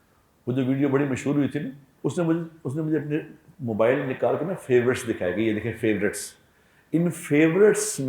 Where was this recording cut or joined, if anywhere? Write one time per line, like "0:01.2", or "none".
0:01.8